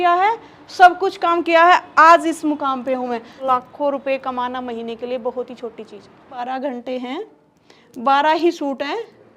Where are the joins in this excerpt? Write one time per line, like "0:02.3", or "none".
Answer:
0:03.4
0:06.4